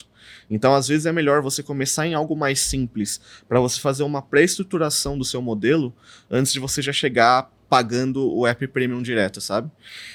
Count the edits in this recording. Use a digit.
0